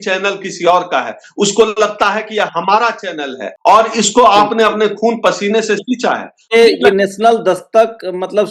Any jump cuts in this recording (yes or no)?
yes